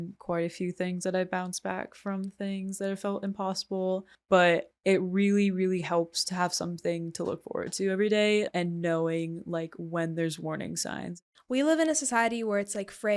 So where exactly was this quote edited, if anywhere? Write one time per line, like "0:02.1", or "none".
0:04.1
0:04.7
0:08.5
0:11.2